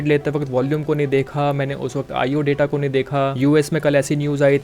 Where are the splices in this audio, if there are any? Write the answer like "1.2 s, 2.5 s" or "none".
3.3 s